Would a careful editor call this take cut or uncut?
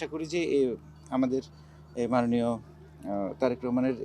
uncut